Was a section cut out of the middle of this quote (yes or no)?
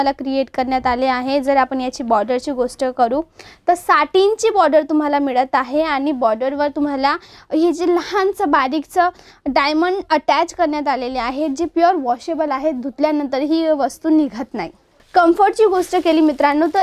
yes